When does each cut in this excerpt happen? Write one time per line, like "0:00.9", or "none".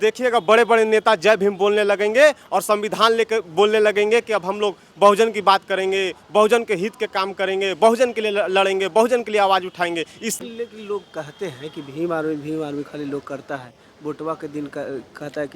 0:10.3